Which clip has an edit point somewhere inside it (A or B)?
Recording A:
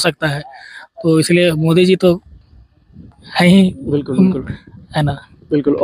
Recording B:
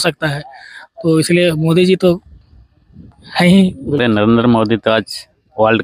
B